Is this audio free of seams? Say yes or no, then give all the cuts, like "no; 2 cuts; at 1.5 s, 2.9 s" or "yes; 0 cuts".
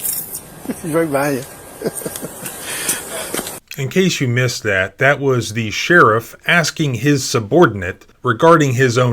yes; 0 cuts